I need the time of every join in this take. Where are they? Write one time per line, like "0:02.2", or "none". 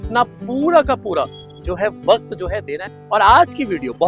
0:02.7

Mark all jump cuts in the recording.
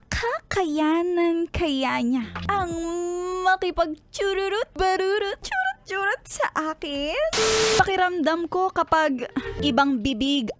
0:02.4
0:04.7
0:05.4
0:07.7
0:09.6

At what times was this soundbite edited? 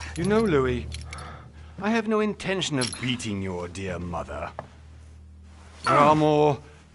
none

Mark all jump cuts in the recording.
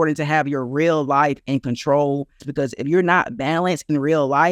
0:02.4

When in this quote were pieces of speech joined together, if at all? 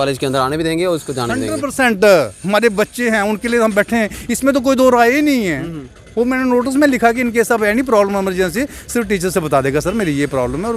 none

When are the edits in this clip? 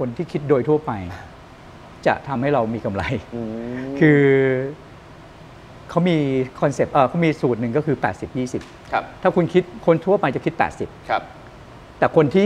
none

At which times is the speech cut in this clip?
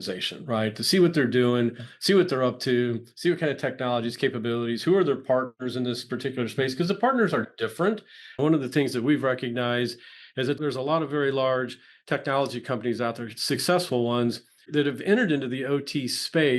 0:10.6
0:14.6

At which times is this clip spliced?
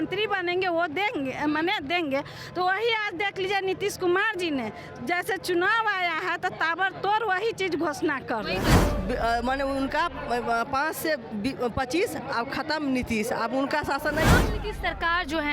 0:08.8
0:14.4

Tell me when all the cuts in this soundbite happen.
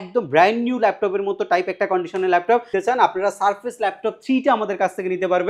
0:02.7

